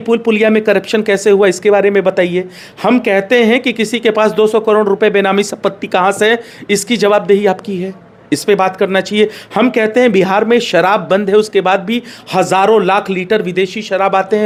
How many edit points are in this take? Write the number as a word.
zero